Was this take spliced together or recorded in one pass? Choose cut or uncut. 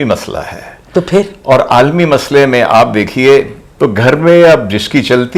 cut